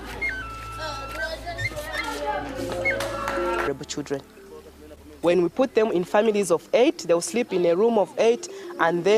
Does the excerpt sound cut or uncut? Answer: uncut